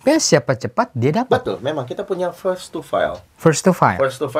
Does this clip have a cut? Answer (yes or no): no